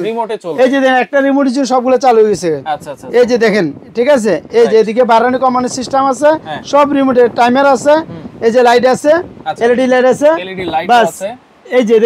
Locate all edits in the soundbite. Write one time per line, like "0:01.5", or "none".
none